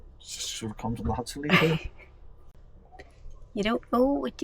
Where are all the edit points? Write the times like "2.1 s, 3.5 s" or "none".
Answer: 2.6 s